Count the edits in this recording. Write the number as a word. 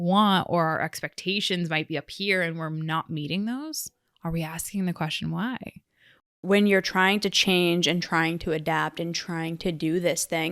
one